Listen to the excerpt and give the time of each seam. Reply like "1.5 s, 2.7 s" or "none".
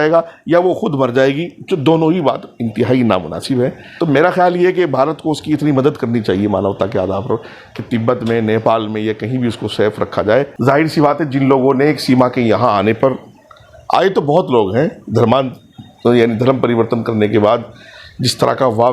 3.8 s, 10.5 s